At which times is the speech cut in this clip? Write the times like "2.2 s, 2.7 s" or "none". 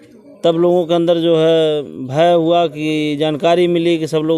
none